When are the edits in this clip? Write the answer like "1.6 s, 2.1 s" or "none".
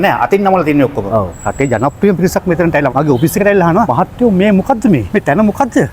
1.4 s, 2.9 s, 3.9 s, 5.1 s